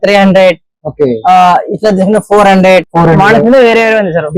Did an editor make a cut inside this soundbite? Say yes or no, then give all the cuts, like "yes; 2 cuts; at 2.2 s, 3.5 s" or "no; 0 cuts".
no; 0 cuts